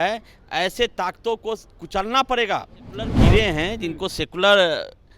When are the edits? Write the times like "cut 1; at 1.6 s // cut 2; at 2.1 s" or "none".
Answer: cut 1; at 3.1 s

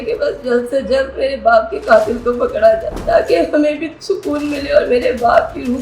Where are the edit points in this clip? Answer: cut 1; at 2.9 s

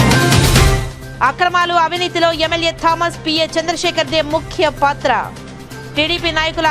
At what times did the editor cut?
cut 1; at 0.9 s

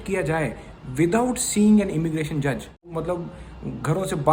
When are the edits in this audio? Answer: cut 1; at 2.9 s

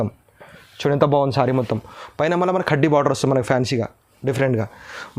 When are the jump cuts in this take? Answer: none

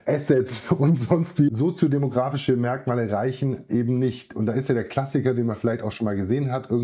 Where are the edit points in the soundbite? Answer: cut 1; at 1.5 s

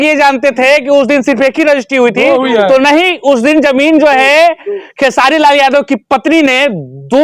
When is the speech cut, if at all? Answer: none

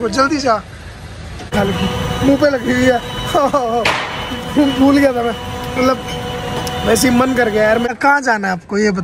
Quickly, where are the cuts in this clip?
cut 1; at 1.5 s // cut 2; at 7.8 s

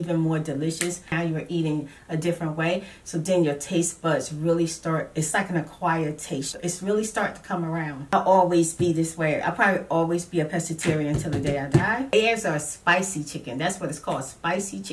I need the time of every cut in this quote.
cut 1; at 1.1 s // cut 2; at 6.5 s // cut 3; at 8.1 s // cut 4; at 12.1 s

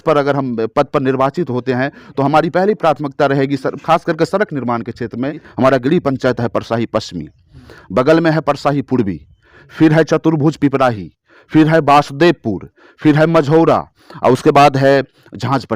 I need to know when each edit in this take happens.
cut 1; at 5.5 s

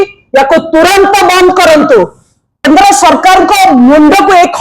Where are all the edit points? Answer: cut 1; at 2.6 s

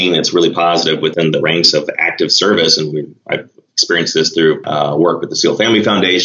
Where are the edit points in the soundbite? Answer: cut 1; at 1.1 s // cut 2; at 4.6 s

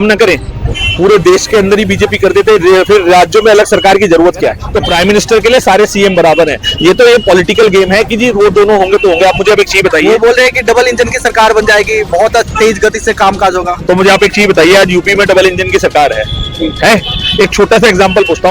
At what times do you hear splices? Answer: cut 1; at 4.6 s

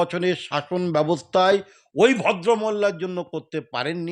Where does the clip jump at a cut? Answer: none

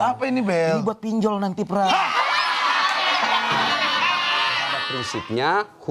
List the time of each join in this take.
cut 1; at 4.9 s

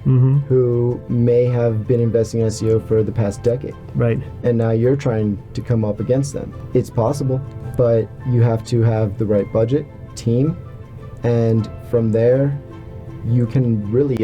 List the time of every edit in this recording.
cut 1; at 6.5 s // cut 2; at 7.6 s // cut 3; at 10.1 s

